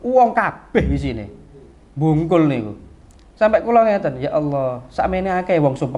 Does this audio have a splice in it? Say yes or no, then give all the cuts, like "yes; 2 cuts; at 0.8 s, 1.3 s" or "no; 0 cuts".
no; 0 cuts